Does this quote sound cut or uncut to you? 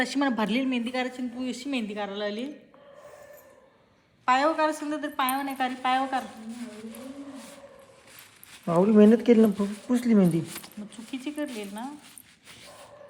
uncut